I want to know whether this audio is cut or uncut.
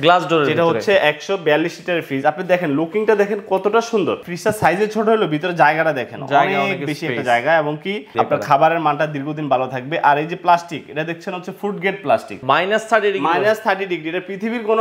cut